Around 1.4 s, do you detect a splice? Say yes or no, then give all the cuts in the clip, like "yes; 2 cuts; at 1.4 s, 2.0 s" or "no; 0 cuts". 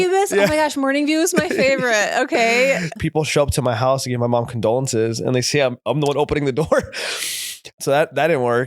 no; 2 cuts; at 2.9 s, 7.8 s